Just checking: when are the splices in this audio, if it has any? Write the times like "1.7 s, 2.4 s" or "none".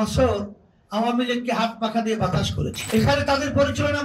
2.8 s